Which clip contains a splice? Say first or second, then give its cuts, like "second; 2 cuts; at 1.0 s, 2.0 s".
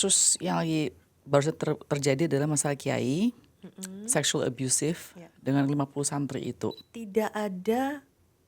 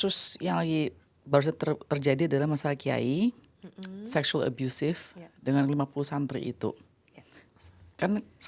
first; 1 cut; at 6.9 s